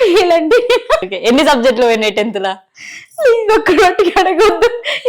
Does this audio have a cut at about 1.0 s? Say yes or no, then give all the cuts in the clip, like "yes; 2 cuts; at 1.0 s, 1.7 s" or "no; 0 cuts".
yes; 1 cut; at 1.0 s